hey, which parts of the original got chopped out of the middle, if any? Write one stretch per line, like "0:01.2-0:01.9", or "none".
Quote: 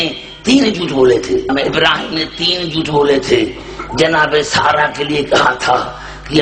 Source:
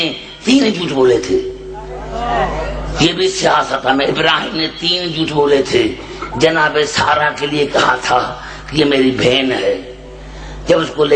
0:01.5-0:03.9